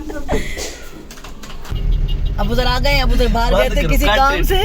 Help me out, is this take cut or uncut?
cut